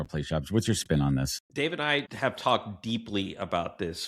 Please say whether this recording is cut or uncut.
cut